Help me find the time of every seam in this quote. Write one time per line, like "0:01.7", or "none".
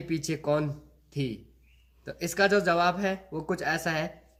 none